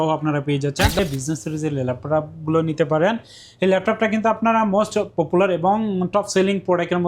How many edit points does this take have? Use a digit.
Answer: 1